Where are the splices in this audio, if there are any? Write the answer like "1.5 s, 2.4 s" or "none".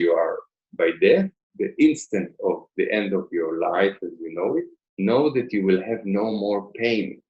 1.4 s, 4.8 s